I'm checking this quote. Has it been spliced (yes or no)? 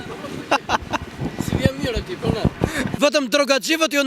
yes